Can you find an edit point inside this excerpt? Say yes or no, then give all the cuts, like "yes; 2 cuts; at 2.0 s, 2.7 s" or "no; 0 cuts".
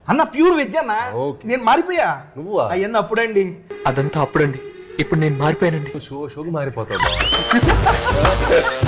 no; 0 cuts